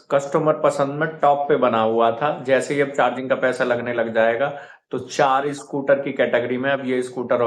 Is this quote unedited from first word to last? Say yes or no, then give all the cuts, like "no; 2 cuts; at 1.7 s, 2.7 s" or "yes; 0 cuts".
yes; 0 cuts